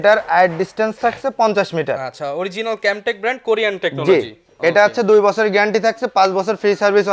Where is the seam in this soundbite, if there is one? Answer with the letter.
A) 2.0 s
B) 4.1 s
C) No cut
C